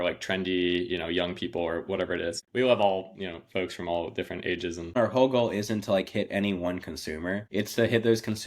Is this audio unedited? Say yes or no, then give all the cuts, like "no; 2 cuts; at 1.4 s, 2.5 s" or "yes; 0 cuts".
no; 3 cuts; at 2.4 s, 5.0 s, 7.5 s